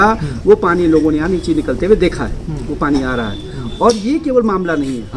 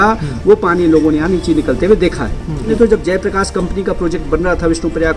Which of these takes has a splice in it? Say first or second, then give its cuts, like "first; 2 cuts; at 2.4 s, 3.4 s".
second; 1 cut; at 2.7 s